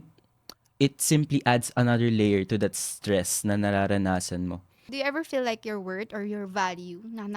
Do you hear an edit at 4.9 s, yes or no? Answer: yes